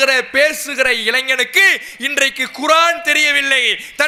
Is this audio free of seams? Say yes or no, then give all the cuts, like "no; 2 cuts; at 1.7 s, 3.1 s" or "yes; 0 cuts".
yes; 0 cuts